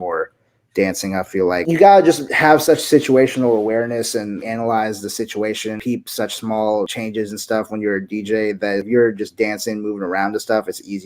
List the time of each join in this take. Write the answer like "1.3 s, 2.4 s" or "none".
1.6 s, 2.3 s, 4.4 s, 5.8 s, 6.9 s, 8.9 s